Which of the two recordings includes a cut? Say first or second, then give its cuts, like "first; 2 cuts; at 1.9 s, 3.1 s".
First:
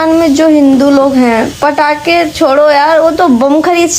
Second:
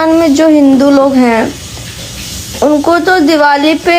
first; 1 cut; at 1.5 s